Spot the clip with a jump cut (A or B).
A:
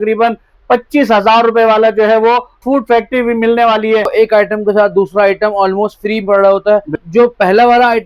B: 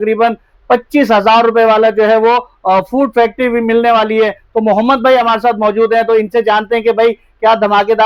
A